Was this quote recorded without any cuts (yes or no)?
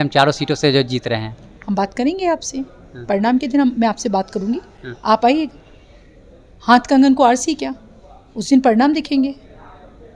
yes